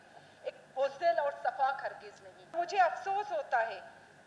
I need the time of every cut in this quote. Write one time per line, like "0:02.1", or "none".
0:02.5